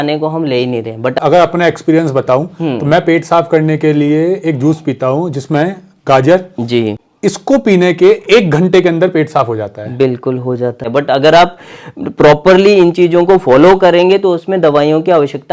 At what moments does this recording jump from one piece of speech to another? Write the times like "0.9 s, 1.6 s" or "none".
1.1 s, 7.0 s, 10.8 s